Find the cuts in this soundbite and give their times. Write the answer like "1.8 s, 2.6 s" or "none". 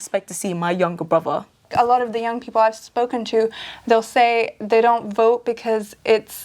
1.7 s